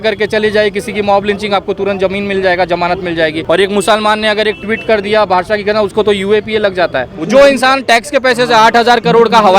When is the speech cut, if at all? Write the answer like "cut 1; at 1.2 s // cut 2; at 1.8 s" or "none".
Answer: cut 1; at 3.4 s // cut 2; at 7.1 s